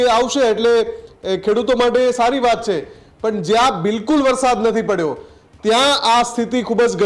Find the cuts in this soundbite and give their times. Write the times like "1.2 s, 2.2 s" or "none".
none

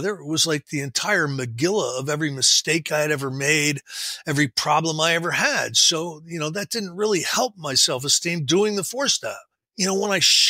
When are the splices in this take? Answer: 9.6 s

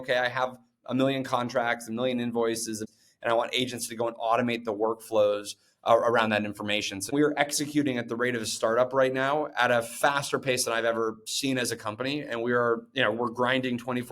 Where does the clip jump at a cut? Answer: 2.8 s, 7.1 s

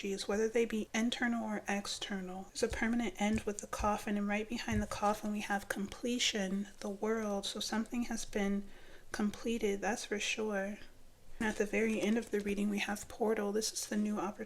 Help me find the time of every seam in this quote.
0.9 s, 2.4 s, 11.4 s

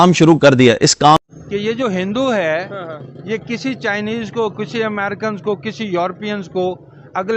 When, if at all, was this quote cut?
1.3 s

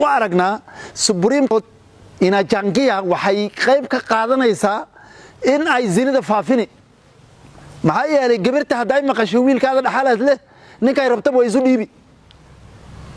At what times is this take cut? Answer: 1.5 s

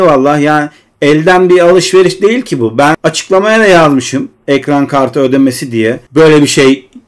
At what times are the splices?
3.0 s, 6.0 s

